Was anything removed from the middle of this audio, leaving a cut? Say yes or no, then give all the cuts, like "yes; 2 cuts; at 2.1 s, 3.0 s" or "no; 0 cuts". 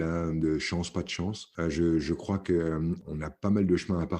yes; 2 cuts; at 1.4 s, 3.0 s